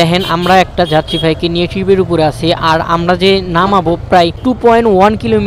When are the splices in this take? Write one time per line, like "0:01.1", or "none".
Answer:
none